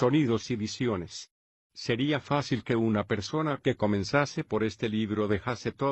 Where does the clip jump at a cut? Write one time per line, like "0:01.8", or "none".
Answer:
0:04.0